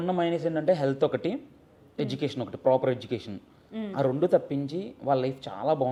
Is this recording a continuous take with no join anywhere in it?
yes; 0 cuts

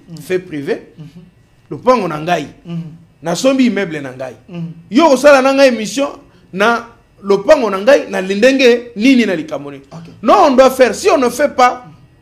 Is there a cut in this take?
no; 0 cuts

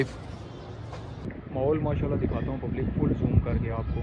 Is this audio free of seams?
no; 1 cut; at 1.2 s

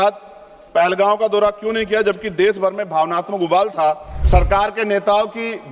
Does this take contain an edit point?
yes; 1 cut; at 4.1 s

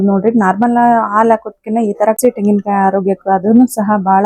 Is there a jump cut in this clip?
yes; 1 cut; at 2.2 s

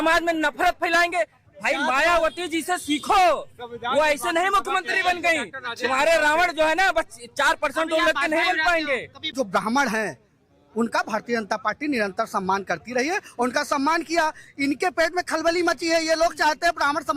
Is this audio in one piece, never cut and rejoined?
no; 1 cut; at 9.2 s

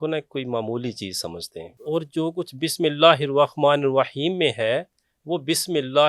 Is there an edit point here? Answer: yes; 1 cut; at 1.7 s

